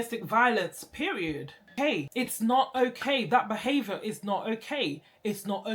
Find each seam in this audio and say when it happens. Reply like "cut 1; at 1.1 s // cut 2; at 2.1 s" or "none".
cut 1; at 1.7 s